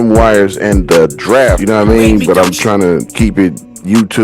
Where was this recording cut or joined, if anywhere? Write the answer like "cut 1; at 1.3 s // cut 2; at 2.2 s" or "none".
cut 1; at 1.6 s